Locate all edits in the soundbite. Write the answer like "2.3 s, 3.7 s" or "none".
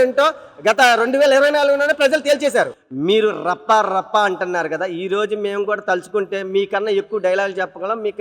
2.8 s